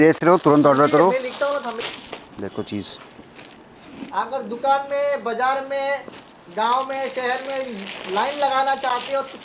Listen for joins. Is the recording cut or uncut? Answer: cut